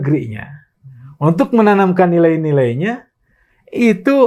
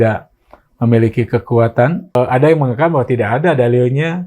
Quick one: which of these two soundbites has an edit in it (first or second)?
second